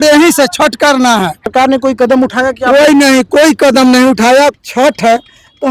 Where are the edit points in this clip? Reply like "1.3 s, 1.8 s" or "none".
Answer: 1.5 s, 4.6 s